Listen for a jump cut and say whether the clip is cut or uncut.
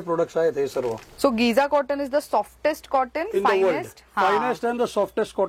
cut